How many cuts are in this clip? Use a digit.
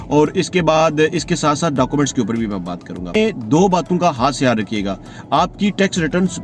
1